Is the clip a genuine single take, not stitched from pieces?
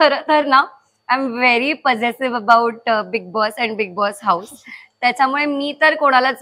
yes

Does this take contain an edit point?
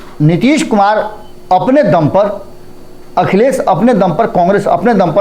no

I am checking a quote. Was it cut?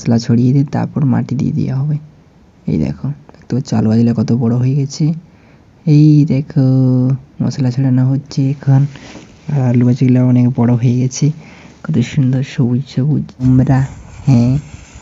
yes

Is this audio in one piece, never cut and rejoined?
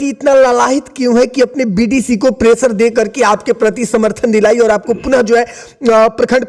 yes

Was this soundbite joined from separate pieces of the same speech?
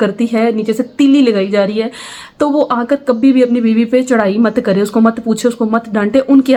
no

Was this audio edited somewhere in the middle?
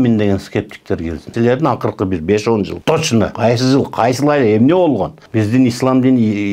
yes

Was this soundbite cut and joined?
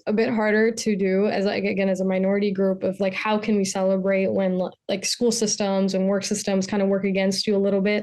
no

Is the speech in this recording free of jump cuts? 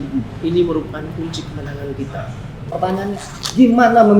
no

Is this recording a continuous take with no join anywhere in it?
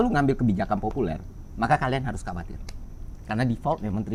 yes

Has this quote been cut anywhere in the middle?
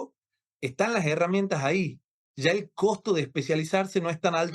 no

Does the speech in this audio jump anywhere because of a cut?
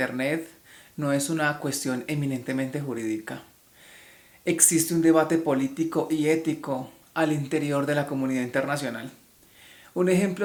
no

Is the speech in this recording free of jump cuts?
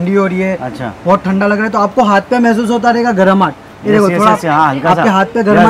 yes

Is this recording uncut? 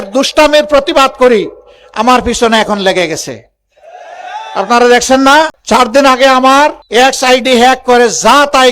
no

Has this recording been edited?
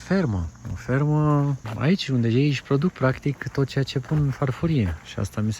yes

